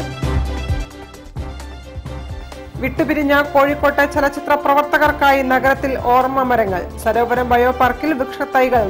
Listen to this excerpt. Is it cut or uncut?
cut